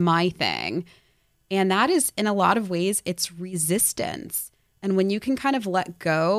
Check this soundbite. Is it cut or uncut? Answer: uncut